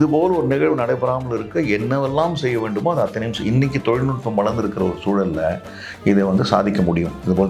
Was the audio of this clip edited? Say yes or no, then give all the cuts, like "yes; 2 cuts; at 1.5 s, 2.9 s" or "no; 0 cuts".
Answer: no; 0 cuts